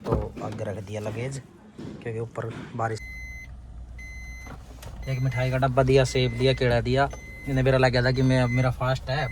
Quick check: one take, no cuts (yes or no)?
no